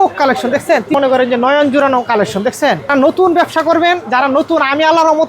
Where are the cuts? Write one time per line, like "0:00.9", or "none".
0:00.9
0:02.9

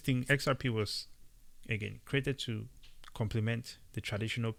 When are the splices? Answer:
none

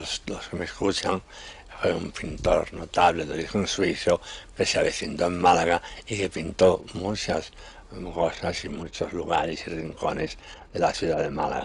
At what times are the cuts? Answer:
none

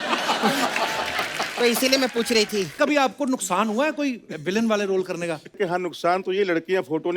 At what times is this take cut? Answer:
0:02.7
0:05.6

